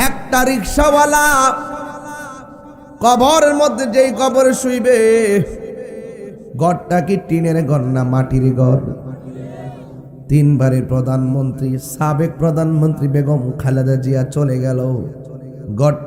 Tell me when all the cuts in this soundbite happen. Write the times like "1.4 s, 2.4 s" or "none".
none